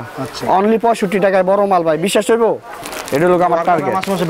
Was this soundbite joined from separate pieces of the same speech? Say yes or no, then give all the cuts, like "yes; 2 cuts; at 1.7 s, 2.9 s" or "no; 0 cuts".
yes; 1 cut; at 2.9 s